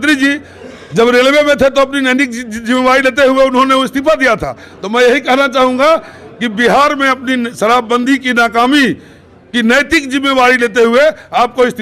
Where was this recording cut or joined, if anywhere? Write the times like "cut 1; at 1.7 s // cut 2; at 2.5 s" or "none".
none